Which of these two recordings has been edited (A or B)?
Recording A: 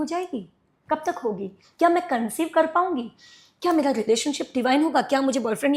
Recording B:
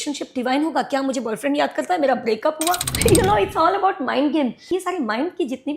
B